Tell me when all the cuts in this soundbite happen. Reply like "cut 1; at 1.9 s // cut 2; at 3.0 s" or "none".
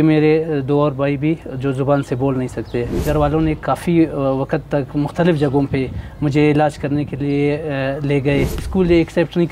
cut 1; at 3.0 s // cut 2; at 8.6 s